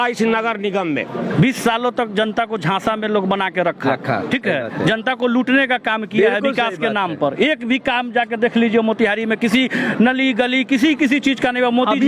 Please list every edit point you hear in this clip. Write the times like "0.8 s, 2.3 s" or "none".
1.2 s